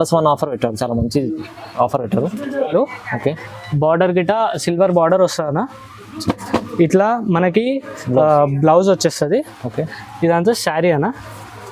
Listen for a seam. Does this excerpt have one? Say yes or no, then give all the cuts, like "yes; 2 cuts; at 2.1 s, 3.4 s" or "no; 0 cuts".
yes; 1 cut; at 2.7 s